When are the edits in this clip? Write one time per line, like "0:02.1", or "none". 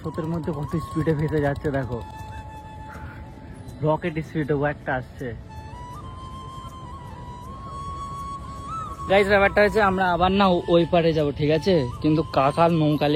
none